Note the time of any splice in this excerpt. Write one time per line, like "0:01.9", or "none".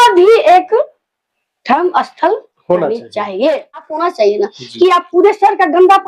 0:03.9